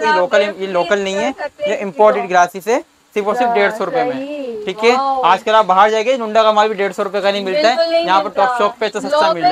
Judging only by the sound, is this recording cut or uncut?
uncut